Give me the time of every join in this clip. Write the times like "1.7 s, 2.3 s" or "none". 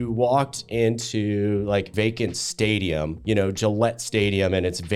1.9 s, 3.2 s